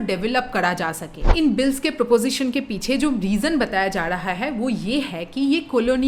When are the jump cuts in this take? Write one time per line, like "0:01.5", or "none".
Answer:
0:01.2